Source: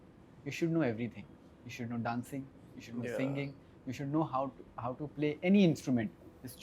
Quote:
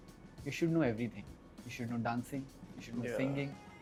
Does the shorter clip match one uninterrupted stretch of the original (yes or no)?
yes